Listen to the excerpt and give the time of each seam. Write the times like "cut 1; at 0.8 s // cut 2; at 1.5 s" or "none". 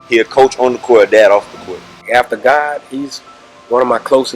cut 1; at 2.1 s